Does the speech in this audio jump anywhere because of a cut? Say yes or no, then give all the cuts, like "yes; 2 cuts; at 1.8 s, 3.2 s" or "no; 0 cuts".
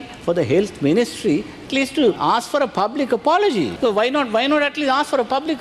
yes; 2 cuts; at 2.2 s, 3.7 s